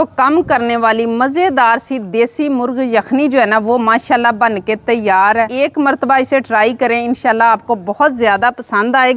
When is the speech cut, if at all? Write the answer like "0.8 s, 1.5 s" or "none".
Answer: 5.5 s